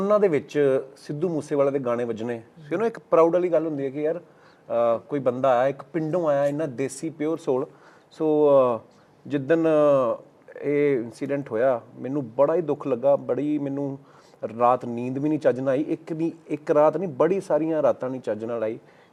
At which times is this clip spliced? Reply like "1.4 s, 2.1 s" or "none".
none